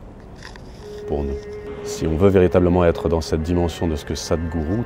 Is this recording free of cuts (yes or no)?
no